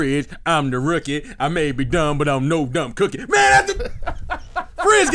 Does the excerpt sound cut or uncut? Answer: uncut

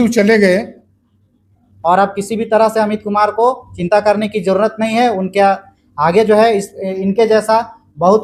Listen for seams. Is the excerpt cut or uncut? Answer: cut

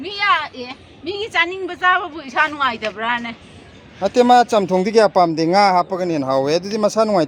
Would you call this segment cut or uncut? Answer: uncut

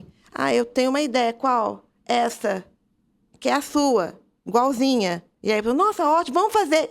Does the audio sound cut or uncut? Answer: cut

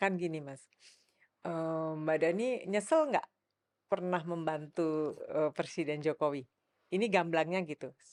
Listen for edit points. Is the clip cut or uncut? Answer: uncut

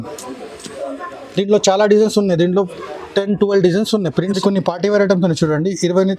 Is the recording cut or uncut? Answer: cut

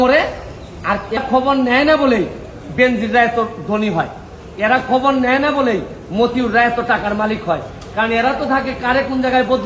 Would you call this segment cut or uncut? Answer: cut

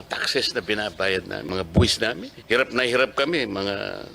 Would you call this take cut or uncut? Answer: cut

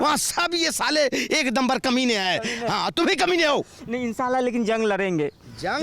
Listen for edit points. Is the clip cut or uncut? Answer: uncut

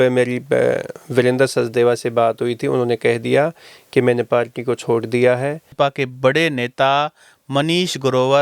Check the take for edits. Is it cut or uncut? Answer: cut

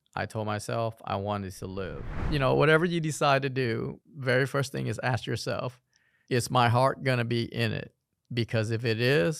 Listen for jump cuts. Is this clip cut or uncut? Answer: cut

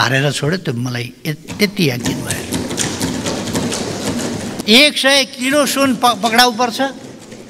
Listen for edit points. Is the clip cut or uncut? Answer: cut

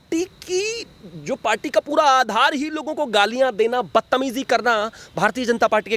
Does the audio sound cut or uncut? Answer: uncut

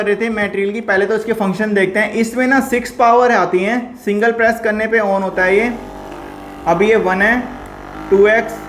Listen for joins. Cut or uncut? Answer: uncut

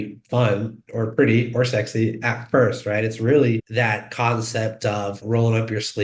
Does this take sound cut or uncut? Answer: cut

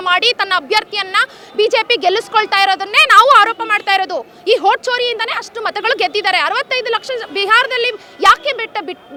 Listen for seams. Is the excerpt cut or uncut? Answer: uncut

